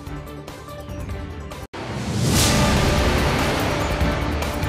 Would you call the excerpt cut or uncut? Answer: cut